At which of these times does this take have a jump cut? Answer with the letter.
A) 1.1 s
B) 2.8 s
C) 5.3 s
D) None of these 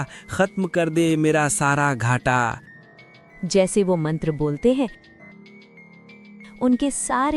C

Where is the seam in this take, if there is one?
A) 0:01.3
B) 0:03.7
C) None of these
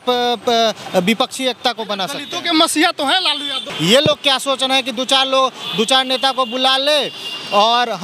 B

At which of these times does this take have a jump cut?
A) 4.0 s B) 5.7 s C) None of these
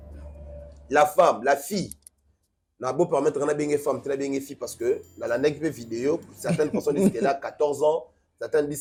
C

